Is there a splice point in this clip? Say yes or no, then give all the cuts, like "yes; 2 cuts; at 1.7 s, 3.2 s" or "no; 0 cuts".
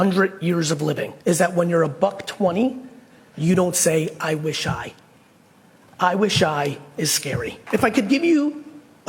yes; 2 cuts; at 1.1 s, 7.5 s